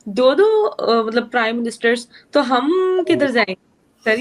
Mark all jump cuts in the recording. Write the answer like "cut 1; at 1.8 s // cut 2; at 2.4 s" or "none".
none